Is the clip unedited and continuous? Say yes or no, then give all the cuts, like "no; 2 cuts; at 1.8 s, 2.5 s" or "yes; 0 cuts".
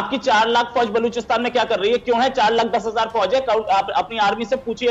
yes; 0 cuts